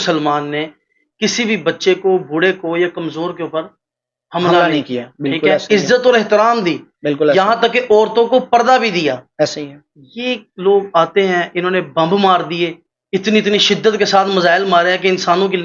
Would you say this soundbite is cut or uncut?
uncut